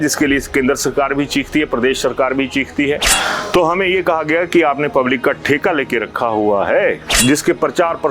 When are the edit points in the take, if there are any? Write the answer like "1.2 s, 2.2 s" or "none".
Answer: 3.1 s, 7.1 s